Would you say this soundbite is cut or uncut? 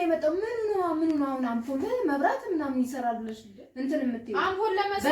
uncut